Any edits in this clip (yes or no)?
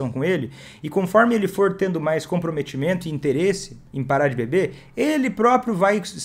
no